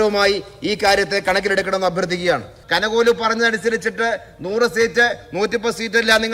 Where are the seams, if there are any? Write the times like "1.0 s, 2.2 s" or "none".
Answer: 2.5 s